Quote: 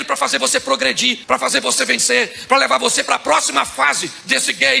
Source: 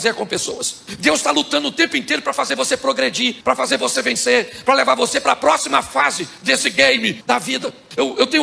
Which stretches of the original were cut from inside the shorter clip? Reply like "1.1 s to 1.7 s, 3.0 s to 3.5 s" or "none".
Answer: none